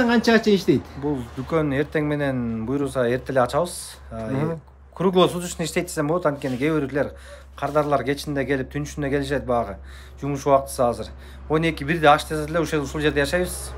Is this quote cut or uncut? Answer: uncut